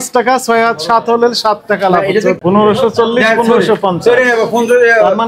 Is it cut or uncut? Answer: cut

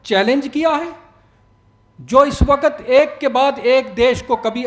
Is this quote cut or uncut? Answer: uncut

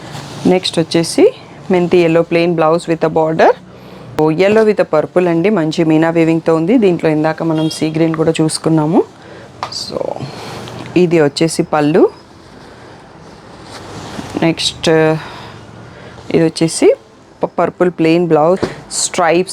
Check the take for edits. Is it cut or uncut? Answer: cut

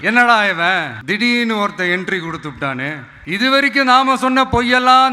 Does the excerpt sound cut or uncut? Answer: cut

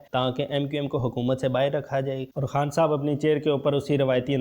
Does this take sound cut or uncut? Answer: cut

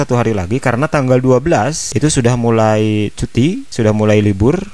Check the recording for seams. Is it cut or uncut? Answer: uncut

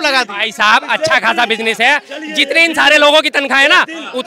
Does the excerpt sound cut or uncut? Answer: uncut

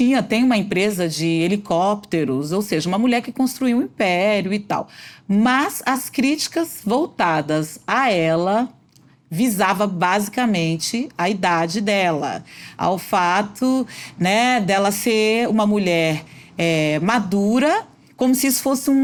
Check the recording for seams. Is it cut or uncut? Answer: uncut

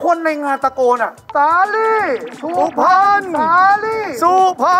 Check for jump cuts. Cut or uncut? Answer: cut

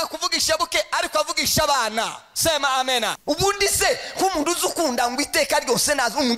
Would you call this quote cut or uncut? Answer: cut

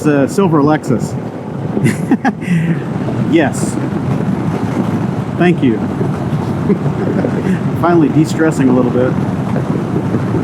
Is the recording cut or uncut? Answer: cut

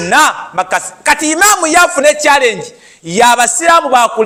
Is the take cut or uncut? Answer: uncut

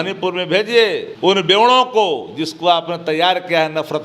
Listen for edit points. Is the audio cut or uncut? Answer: cut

